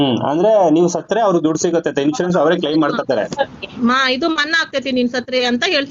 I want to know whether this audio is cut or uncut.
uncut